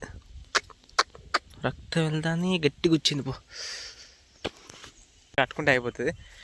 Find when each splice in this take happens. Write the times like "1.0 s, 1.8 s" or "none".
5.4 s